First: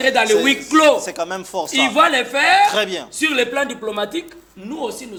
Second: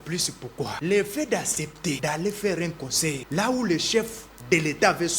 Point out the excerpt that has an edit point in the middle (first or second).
second